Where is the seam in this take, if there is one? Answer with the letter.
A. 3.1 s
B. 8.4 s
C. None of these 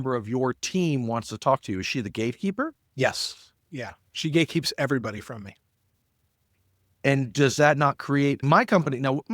B